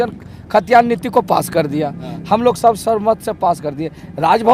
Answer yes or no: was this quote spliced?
no